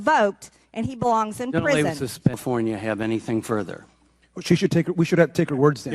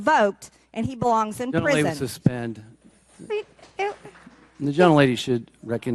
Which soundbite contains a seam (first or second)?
first